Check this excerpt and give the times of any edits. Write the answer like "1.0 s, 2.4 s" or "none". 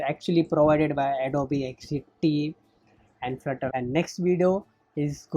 3.7 s